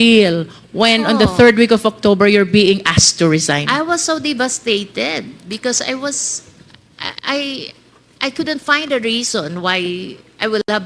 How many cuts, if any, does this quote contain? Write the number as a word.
zero